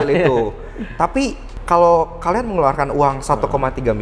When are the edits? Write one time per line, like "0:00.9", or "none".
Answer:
0:01.5